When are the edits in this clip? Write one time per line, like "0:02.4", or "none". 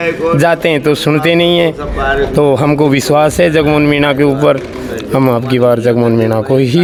none